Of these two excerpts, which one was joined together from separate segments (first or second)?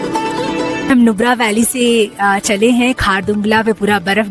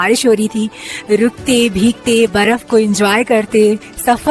first